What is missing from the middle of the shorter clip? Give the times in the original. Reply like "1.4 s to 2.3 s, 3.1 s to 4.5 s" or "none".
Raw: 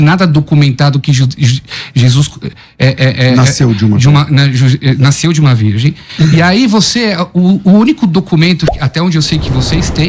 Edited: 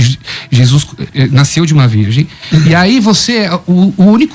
2.6 s to 4.8 s